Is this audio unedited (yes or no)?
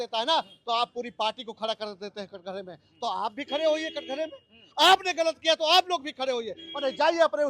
yes